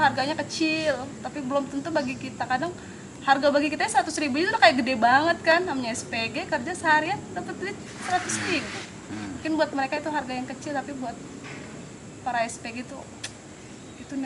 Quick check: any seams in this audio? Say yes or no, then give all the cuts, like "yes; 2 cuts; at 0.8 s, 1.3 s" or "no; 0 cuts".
no; 0 cuts